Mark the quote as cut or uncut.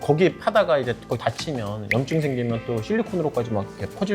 uncut